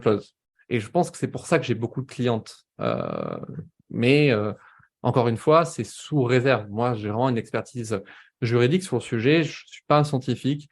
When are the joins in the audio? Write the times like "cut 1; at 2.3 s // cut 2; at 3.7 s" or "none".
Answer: none